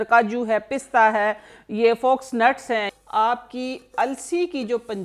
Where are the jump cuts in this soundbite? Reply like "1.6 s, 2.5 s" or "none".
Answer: 2.9 s